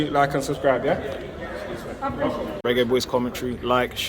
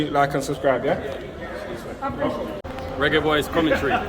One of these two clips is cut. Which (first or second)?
second